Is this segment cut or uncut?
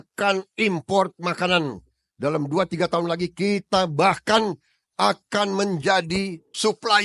uncut